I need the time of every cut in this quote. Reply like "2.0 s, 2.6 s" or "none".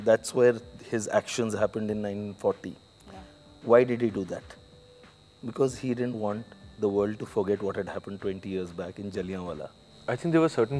9.8 s